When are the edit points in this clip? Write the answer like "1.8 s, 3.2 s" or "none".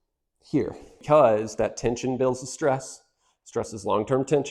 0.9 s